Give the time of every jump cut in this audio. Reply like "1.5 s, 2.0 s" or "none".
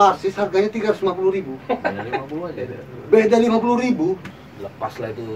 4.2 s